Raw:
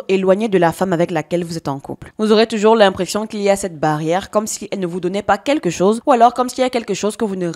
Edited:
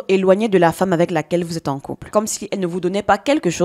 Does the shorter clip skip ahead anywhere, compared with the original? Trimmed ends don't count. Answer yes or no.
yes